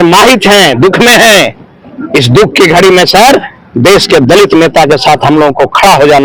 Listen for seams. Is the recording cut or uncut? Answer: uncut